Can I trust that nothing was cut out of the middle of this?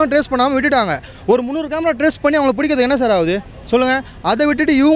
yes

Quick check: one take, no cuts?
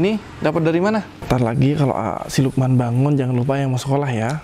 no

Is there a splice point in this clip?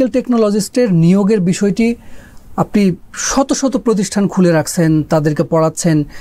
no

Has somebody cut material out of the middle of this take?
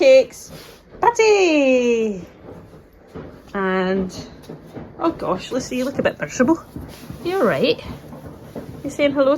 no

